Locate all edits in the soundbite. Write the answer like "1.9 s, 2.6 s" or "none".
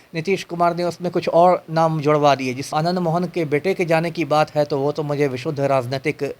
2.7 s